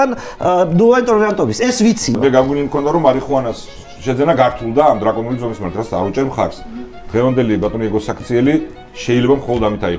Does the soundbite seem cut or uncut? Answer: cut